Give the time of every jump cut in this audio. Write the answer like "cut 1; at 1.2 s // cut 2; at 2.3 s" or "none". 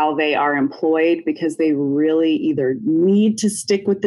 none